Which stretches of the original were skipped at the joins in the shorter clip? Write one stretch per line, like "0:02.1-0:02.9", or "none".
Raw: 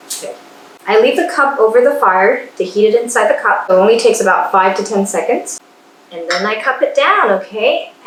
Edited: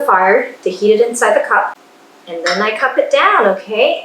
0:03.6-0:05.5